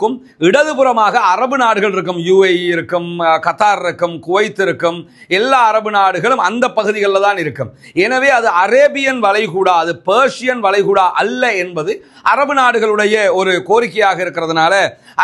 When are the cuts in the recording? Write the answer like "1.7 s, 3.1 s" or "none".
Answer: none